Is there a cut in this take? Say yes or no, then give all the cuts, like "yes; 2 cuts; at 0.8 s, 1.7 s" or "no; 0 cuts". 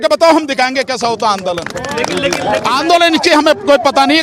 yes; 1 cut; at 2.7 s